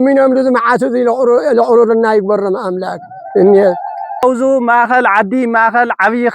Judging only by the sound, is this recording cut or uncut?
cut